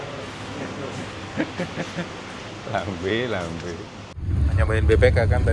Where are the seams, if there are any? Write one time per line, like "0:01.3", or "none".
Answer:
0:02.3
0:04.2

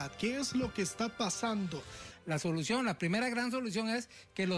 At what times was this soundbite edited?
0:02.1

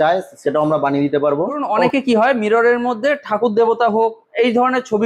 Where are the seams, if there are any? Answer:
0:01.7

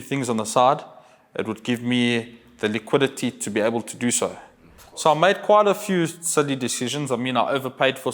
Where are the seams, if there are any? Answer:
0:05.0

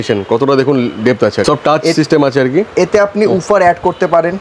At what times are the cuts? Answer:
0:01.4

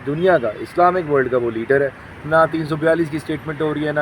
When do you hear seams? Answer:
0:02.1

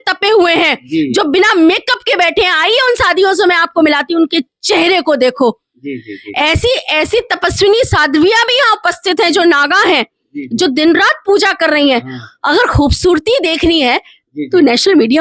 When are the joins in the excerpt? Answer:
none

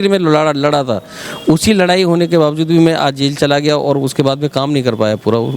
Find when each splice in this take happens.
none

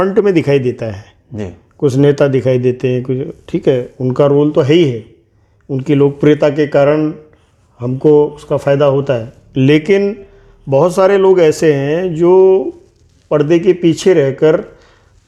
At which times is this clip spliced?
none

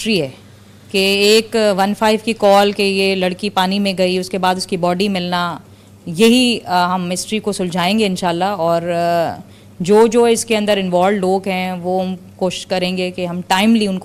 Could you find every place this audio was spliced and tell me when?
none

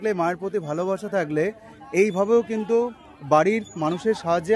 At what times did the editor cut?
none

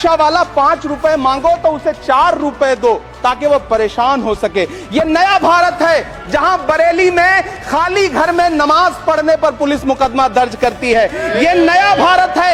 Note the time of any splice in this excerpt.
none

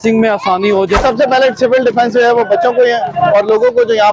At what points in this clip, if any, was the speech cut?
0:01.0

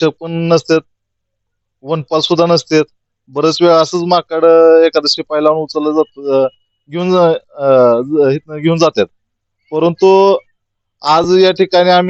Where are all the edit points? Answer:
none

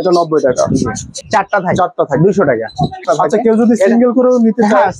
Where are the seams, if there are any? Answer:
0:01.2
0:03.0

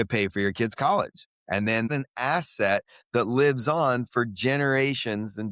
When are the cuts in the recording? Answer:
0:01.9

